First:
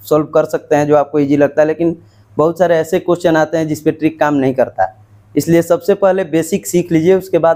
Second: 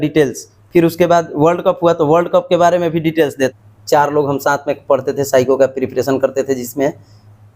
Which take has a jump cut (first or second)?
second